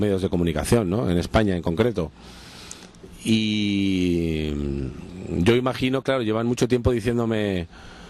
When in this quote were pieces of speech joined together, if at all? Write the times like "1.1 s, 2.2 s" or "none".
3.9 s